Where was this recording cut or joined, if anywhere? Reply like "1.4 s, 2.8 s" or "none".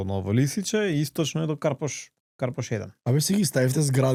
none